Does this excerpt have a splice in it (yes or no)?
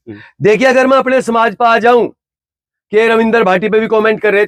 no